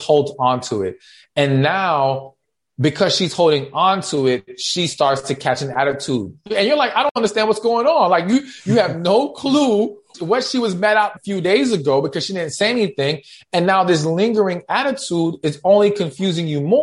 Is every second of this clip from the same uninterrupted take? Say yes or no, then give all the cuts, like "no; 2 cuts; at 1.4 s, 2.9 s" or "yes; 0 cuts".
no; 3 cuts; at 6.5 s, 10.1 s, 11.2 s